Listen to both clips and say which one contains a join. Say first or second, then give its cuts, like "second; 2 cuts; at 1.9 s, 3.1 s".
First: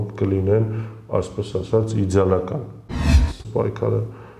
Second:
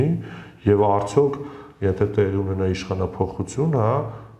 first; 1 cut; at 3.3 s